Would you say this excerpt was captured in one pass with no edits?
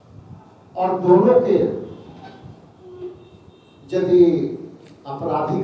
yes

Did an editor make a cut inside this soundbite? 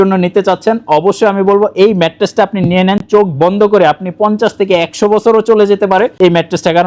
no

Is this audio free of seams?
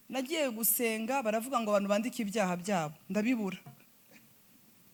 yes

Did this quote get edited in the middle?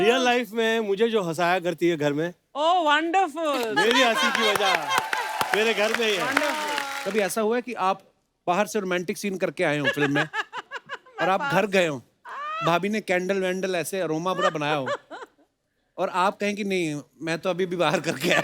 yes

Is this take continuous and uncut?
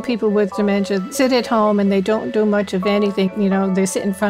no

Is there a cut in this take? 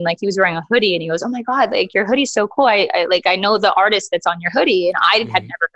no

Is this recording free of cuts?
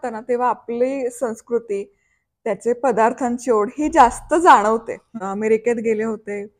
no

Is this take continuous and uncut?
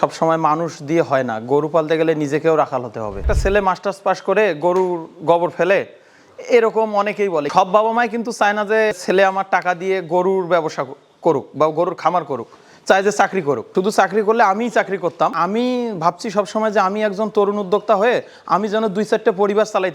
no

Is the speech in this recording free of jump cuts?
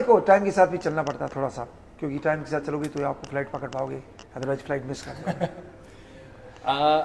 yes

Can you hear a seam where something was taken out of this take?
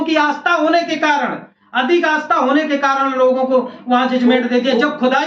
no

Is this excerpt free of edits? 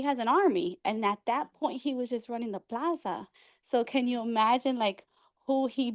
yes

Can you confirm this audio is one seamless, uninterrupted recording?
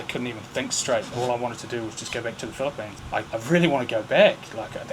no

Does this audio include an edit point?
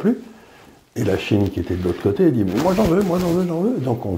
no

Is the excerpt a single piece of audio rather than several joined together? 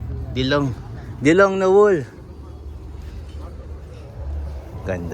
no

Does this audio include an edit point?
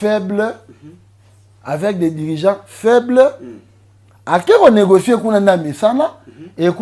no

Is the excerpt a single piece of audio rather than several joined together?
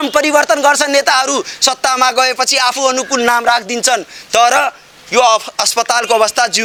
yes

